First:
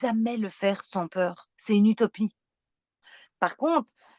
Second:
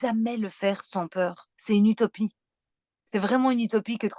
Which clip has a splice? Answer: first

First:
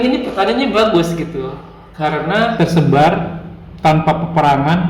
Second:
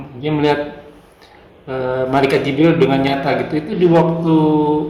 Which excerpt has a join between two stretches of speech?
first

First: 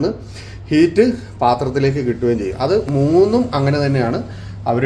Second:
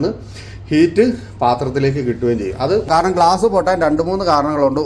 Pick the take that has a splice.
second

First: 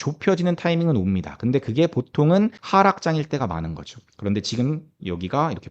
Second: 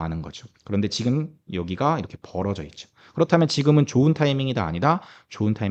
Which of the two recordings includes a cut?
first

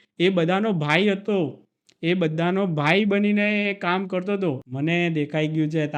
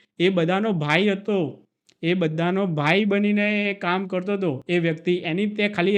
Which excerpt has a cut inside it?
first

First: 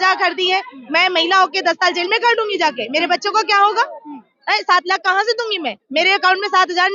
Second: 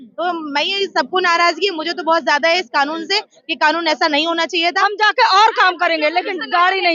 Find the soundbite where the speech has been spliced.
second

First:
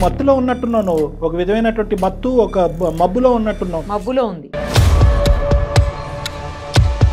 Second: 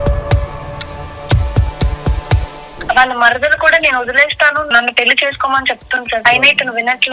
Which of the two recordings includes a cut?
second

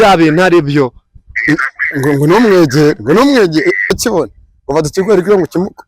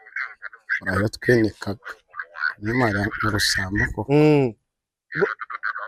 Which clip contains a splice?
first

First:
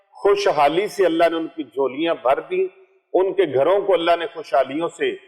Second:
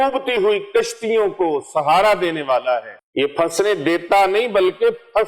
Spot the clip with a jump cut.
second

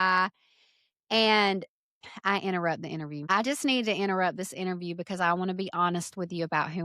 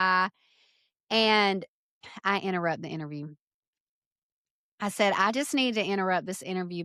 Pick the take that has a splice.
first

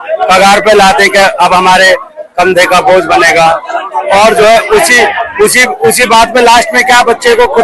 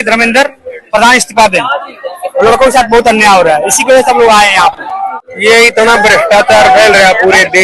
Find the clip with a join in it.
second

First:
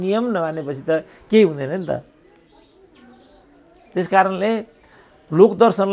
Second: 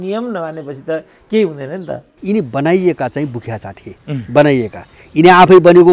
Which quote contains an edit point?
second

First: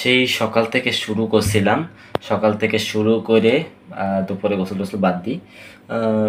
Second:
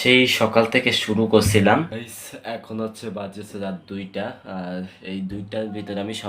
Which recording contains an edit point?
second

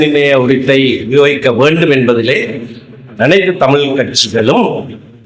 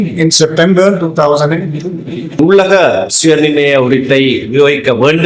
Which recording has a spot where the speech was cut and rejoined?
second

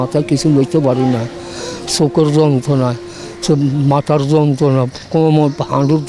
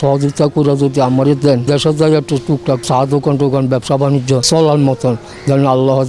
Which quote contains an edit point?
second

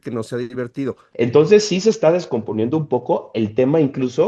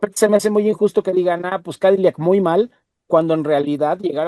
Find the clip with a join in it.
first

